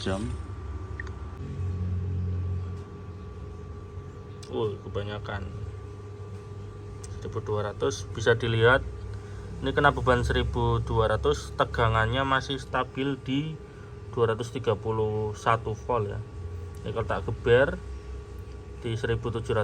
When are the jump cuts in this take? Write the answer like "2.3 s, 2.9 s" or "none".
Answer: 1.4 s